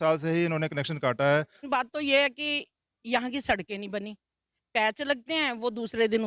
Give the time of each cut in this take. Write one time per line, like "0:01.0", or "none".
0:01.6